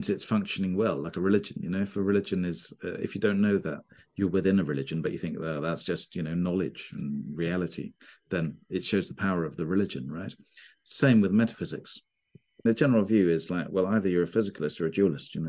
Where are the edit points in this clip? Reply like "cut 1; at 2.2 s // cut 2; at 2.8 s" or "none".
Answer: cut 1; at 12.7 s